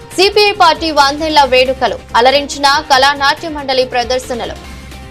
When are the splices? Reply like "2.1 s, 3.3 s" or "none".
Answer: none